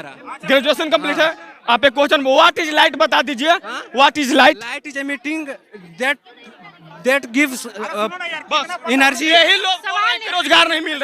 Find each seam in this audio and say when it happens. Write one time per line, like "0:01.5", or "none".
none